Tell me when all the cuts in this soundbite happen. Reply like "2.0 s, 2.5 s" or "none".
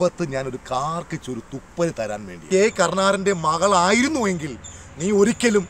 2.4 s